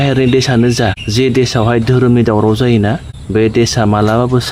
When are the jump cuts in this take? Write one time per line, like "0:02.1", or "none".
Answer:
0:01.0
0:03.1